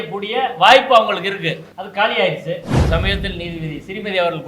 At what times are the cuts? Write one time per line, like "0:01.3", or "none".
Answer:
0:01.7
0:02.8